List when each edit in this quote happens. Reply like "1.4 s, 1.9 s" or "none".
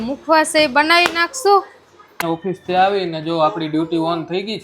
2.2 s